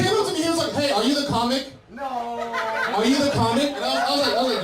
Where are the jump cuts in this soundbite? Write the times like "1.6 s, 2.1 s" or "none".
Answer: none